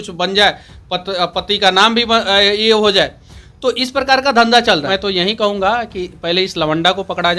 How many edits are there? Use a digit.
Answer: 0